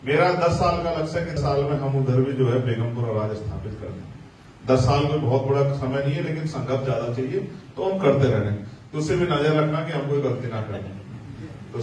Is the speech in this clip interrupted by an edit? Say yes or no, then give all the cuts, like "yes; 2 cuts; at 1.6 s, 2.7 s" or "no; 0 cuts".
yes; 1 cut; at 1.4 s